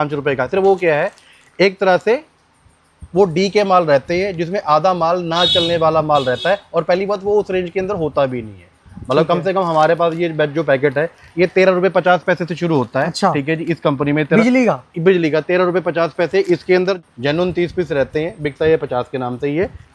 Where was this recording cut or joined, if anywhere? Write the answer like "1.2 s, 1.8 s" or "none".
17.0 s